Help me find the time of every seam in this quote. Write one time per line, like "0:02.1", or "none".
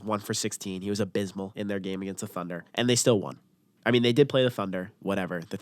0:01.5
0:02.6